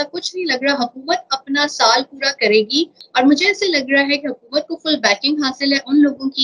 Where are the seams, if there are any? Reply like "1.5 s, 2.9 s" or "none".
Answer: 3.0 s